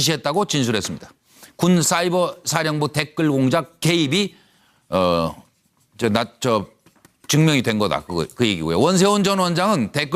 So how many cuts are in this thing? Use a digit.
1